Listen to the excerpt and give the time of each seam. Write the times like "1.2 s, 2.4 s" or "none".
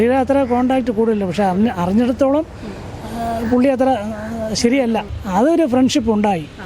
5.1 s